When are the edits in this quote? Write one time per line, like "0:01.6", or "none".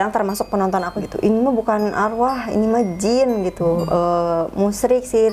0:01.0